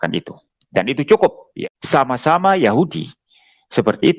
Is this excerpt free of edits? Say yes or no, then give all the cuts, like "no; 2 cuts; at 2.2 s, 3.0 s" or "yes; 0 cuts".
no; 1 cut; at 1.5 s